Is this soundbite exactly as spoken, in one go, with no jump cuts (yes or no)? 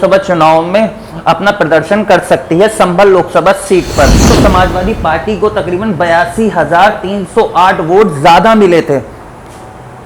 no